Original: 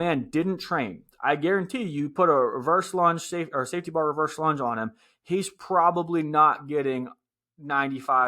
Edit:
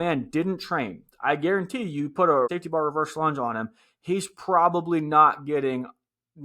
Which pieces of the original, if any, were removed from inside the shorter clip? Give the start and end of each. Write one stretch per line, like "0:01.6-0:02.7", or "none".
0:02.5-0:03.7